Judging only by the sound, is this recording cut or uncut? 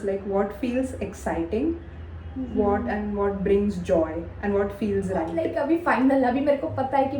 cut